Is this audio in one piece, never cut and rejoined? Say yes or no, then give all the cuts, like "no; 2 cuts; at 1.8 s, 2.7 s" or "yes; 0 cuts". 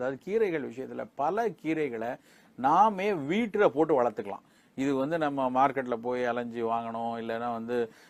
yes; 0 cuts